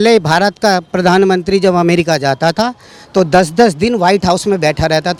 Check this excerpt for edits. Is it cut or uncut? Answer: uncut